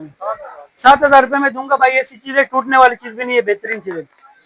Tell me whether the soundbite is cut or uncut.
uncut